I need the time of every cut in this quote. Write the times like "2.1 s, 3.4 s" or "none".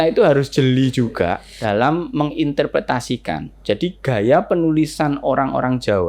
1.6 s